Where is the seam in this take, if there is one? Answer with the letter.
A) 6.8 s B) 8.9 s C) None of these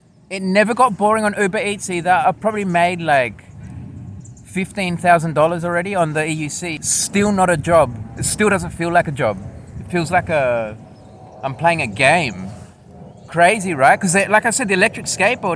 A